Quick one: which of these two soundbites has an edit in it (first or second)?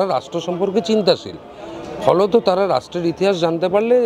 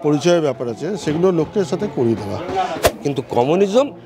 second